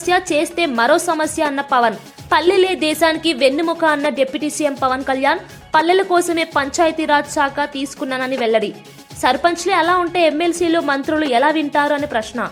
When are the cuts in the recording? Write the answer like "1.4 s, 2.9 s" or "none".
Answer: none